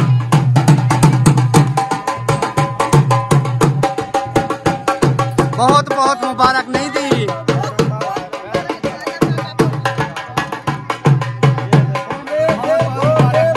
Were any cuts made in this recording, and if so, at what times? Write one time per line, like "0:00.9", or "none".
0:09.8